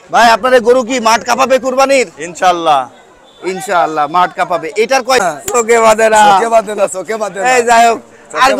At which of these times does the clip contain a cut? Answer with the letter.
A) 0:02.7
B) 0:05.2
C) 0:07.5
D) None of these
B